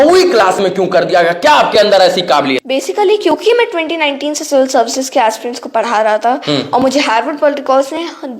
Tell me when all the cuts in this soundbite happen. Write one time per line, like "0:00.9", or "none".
0:02.6